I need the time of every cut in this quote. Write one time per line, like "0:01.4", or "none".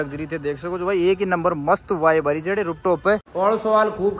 0:03.3